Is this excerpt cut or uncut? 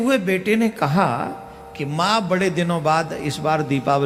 uncut